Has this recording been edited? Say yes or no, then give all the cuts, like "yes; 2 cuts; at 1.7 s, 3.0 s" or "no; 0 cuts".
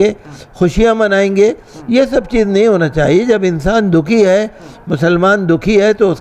no; 0 cuts